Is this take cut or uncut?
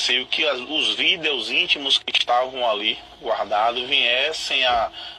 uncut